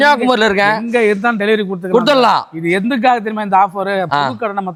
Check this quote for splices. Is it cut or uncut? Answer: uncut